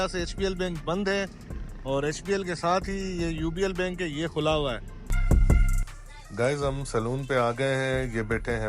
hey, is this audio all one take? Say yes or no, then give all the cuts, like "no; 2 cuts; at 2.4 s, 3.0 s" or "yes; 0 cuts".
no; 1 cut; at 5.1 s